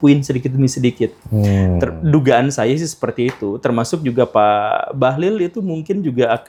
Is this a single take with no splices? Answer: yes; 0 cuts

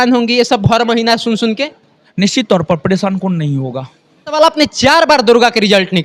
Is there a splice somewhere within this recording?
no; 0 cuts

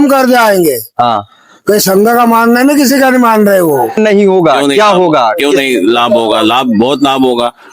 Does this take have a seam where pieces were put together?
yes; 1 cut; at 4.0 s

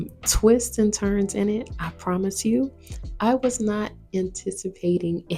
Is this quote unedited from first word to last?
yes; 0 cuts

